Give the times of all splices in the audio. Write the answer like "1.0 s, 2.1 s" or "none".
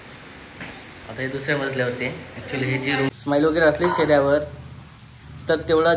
3.1 s